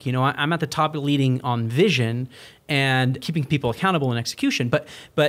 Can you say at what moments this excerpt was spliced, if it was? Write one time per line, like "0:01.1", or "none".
0:03.2